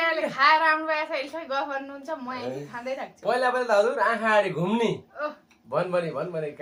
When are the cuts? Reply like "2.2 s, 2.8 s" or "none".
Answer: none